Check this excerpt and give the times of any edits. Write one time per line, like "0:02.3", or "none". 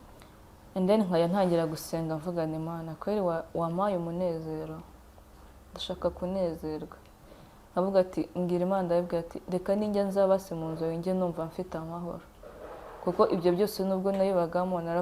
none